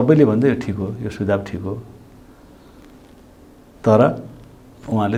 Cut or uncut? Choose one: uncut